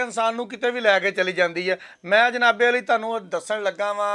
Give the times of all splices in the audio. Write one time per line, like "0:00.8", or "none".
none